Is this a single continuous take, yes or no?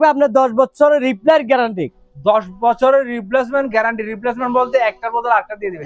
yes